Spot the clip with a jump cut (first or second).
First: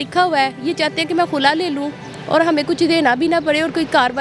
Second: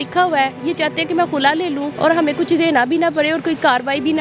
second